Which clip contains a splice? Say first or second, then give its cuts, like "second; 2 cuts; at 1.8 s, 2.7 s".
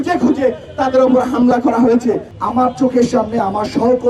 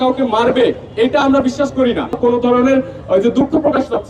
second; 1 cut; at 2.2 s